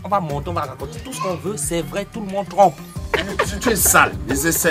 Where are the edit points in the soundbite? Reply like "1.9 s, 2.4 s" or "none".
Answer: 3.1 s